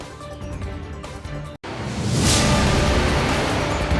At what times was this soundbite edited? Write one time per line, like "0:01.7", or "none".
0:00.8
0:01.6